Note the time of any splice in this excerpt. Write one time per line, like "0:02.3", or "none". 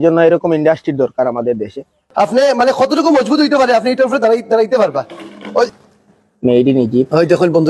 0:02.0
0:05.8